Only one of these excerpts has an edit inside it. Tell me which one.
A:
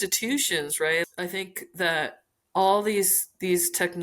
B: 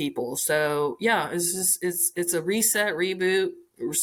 A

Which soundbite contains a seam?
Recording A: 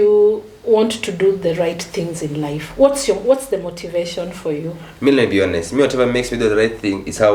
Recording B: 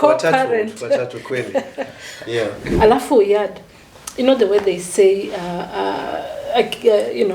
B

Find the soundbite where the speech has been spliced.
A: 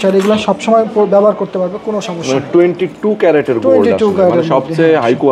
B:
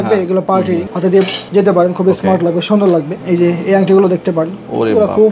B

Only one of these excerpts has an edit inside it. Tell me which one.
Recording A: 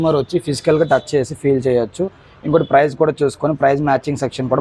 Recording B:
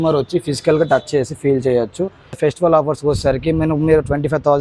B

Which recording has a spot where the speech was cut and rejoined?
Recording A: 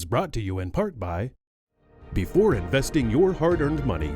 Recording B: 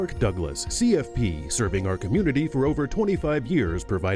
A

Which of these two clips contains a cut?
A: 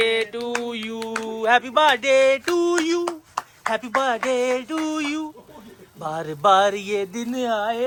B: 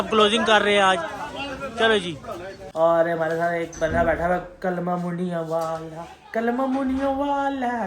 B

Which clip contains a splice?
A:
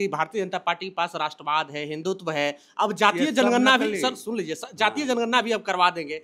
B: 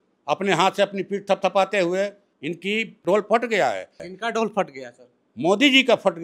B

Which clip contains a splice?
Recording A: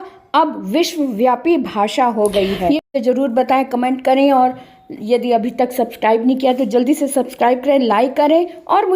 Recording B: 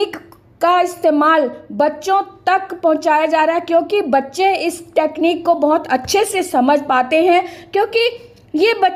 A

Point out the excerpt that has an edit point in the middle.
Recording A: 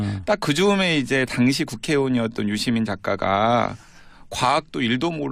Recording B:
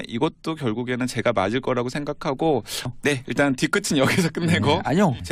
A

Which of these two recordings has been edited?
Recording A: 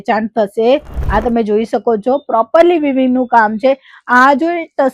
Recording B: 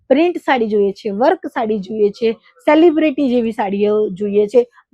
A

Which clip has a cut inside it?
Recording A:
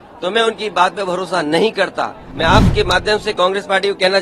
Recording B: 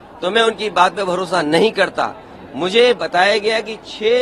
A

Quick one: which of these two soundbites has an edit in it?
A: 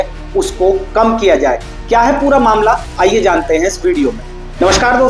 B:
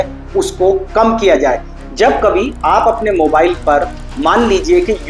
B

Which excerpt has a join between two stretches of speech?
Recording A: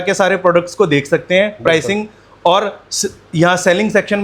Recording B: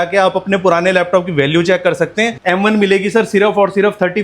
B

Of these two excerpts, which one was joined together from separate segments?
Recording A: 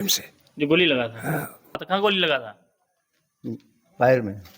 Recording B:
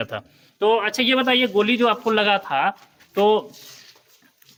A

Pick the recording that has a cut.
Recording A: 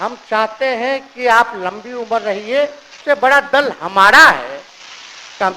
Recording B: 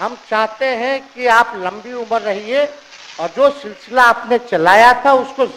A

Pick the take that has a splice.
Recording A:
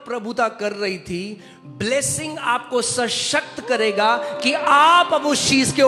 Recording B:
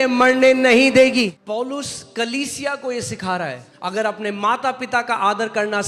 B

